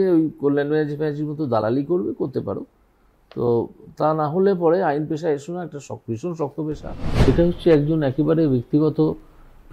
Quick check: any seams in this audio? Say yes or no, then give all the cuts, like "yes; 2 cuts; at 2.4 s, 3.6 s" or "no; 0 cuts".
yes; 1 cut; at 7.3 s